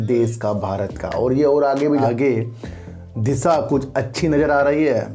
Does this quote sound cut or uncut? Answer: cut